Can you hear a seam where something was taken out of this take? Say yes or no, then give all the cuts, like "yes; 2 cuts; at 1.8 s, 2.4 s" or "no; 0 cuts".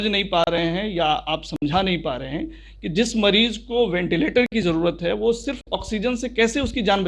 no; 0 cuts